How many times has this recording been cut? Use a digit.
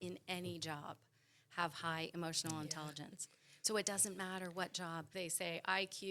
1